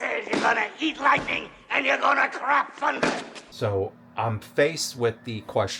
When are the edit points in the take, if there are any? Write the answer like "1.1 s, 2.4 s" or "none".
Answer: 3.4 s

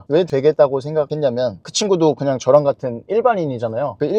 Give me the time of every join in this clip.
none

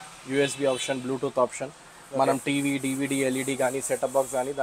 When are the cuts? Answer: none

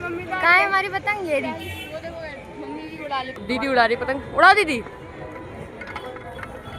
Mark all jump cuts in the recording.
3.4 s

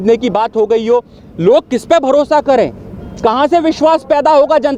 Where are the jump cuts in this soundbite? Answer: none

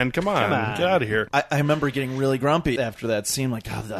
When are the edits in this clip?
1.3 s, 2.8 s

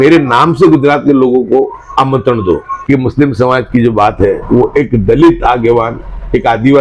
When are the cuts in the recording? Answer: 2.7 s

